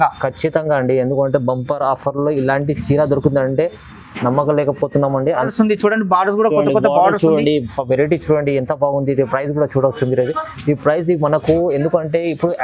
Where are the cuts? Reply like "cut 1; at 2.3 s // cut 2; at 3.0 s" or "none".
cut 1; at 5.4 s